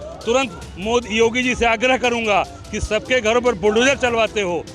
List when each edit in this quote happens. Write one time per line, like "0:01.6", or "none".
none